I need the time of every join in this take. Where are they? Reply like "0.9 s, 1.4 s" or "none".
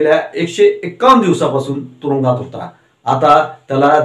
none